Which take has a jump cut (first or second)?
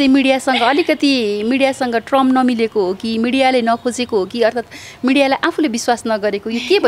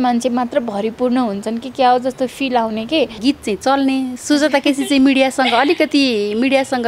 second